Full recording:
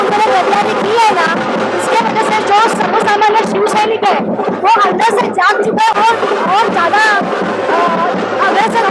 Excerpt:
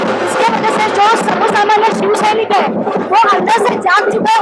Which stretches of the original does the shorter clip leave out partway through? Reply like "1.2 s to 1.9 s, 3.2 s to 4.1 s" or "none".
none